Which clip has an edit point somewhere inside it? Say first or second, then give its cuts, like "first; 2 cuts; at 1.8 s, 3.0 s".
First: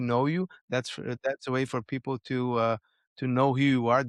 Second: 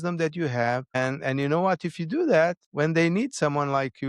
second; 2 cuts; at 0.9 s, 2.6 s